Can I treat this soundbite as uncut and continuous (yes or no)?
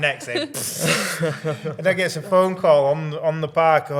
yes